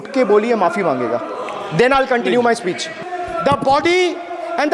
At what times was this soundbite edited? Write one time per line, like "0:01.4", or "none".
0:02.9